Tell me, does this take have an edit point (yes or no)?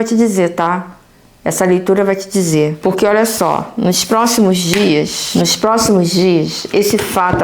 yes